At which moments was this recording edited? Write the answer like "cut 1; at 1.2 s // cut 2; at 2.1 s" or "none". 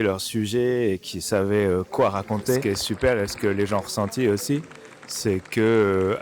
cut 1; at 2.6 s